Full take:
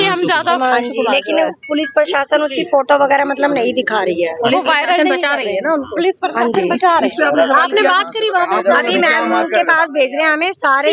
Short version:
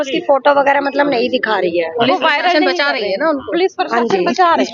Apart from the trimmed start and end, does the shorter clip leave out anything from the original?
no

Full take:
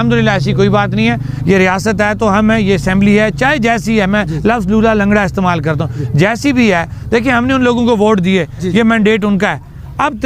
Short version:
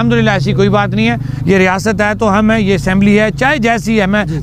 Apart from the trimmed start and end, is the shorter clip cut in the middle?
no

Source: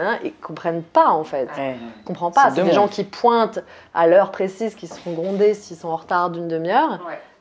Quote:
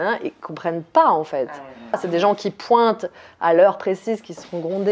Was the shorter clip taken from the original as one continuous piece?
no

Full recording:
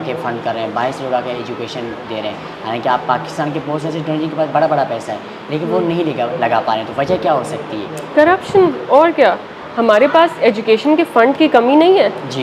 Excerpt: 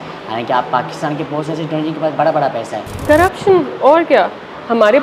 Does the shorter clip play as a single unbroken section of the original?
no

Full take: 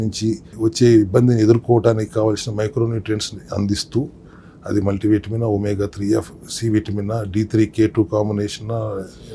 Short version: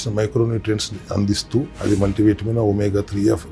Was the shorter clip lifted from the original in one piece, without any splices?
no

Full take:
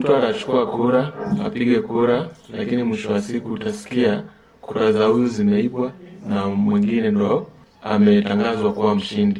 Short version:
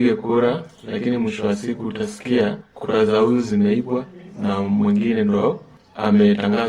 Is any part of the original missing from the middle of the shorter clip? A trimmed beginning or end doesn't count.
yes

